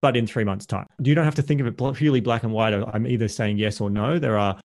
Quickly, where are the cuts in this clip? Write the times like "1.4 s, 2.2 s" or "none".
0.9 s